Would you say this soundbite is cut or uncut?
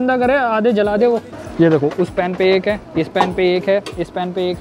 cut